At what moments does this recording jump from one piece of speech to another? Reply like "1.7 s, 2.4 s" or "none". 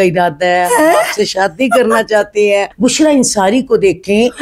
2.7 s